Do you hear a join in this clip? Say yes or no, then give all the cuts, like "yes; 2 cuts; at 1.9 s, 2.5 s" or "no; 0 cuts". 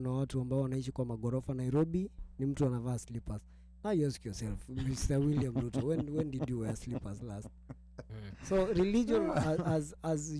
no; 0 cuts